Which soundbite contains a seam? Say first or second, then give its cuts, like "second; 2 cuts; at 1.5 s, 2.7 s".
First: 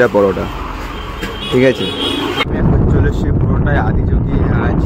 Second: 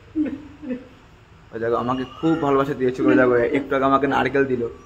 first; 1 cut; at 2.4 s